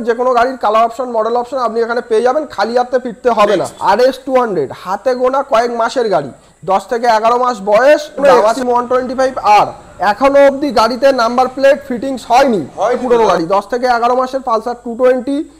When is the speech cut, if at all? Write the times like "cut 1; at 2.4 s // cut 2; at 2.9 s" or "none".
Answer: cut 1; at 3.7 s // cut 2; at 8.2 s // cut 3; at 13.0 s